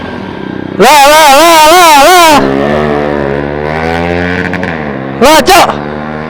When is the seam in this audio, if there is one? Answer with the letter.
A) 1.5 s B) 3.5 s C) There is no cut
B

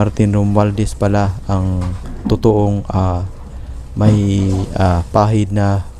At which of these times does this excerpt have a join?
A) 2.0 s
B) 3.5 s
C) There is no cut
C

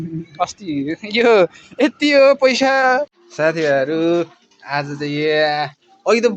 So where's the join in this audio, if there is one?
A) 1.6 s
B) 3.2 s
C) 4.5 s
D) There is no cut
B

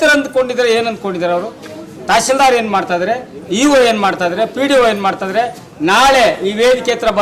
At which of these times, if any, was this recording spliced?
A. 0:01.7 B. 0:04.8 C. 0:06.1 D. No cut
D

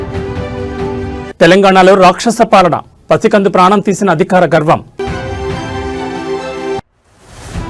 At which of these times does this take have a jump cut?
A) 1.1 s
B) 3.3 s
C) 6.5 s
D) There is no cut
A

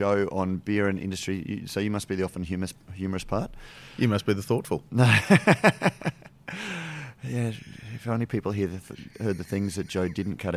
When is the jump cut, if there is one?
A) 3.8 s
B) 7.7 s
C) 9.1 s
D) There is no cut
D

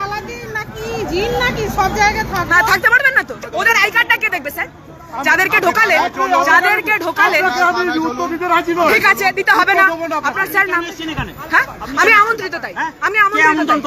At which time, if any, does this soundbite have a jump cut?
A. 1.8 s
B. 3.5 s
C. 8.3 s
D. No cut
B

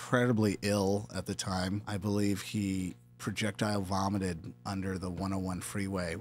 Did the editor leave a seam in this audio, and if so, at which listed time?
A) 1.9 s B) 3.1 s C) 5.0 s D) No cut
A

